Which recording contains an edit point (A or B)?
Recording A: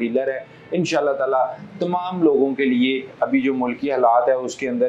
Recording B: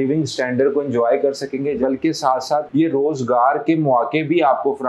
B